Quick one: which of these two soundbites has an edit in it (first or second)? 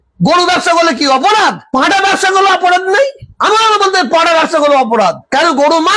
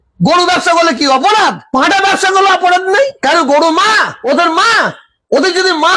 second